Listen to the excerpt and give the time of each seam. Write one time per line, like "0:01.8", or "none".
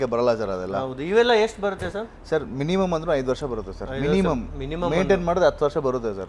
none